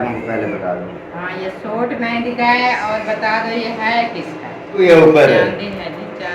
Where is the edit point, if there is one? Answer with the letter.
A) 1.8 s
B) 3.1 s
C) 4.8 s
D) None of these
C